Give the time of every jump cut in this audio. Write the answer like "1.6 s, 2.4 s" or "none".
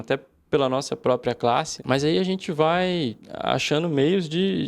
1.7 s, 3.3 s

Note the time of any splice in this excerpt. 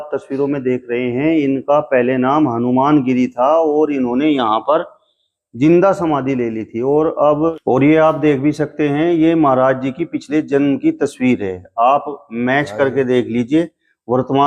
7.6 s

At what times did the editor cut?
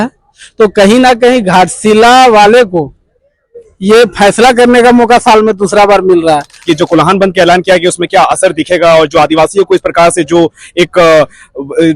6.7 s

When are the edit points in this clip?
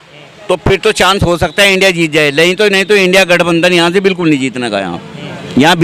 none

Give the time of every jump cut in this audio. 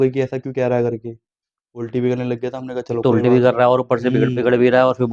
none

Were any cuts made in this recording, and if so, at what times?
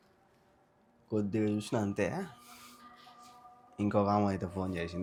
none

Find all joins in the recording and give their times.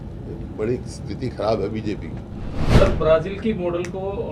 2.5 s

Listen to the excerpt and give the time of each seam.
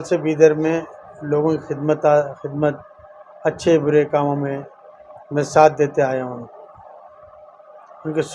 none

